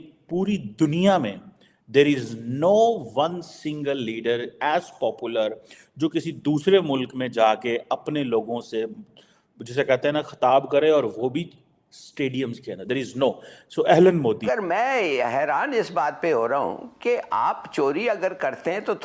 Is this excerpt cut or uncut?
cut